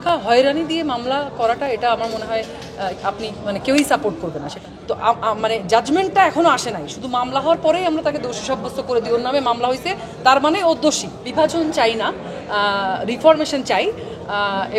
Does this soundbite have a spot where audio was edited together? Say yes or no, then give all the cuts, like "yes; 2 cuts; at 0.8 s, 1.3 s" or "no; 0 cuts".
yes; 2 cuts; at 4.5 s, 11.2 s